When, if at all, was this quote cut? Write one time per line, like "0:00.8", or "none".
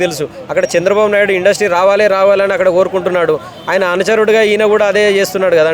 none